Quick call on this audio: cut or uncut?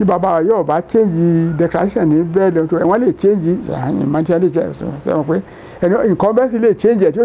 uncut